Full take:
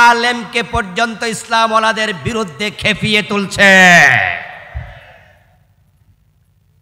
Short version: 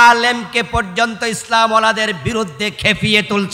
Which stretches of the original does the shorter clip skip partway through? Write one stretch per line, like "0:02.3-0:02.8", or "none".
none